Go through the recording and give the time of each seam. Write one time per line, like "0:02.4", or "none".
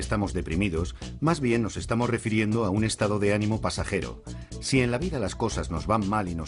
0:01.0